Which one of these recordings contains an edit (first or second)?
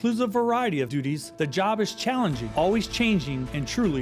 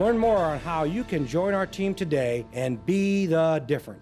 first